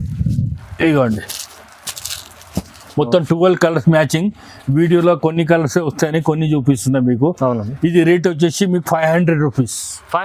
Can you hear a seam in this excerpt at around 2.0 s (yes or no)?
no